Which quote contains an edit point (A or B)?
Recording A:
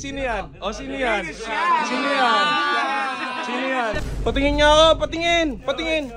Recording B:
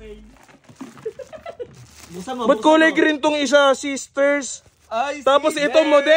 A